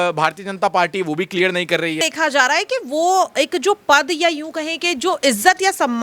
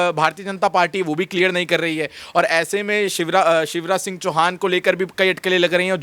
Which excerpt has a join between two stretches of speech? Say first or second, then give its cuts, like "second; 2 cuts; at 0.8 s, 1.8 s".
first; 1 cut; at 2.0 s